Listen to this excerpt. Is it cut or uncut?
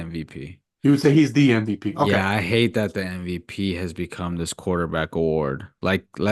uncut